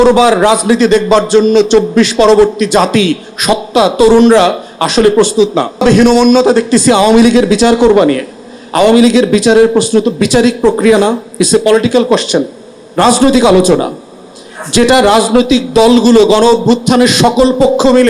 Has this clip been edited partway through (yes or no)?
yes